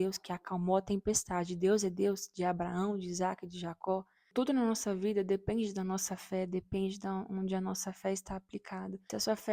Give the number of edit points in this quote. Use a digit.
1